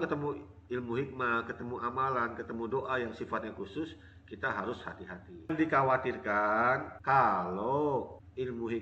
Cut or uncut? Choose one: cut